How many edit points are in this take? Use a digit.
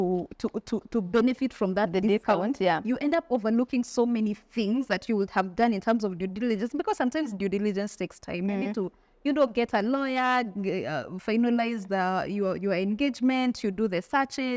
0